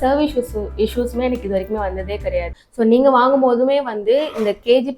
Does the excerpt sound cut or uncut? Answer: cut